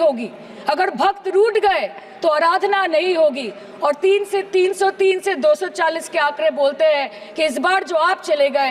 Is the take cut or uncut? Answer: uncut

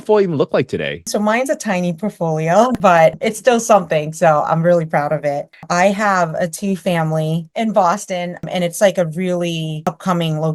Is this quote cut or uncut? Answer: cut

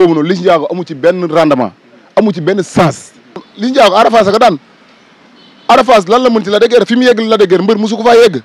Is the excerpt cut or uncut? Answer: cut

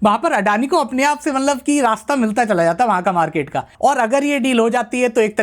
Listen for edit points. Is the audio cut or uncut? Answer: cut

